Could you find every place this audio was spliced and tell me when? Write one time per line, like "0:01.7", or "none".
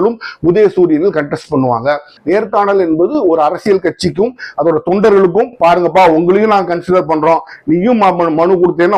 0:02.1